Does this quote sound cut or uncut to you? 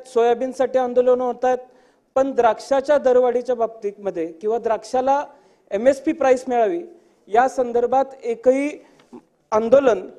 uncut